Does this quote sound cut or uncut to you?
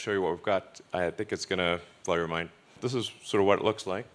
cut